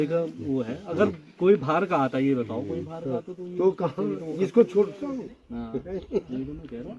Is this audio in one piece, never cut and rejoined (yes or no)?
yes